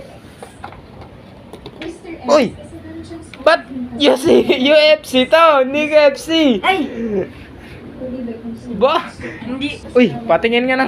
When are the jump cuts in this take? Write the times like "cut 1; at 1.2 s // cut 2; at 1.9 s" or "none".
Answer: cut 1; at 9.8 s